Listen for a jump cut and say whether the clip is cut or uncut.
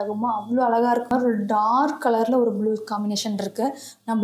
cut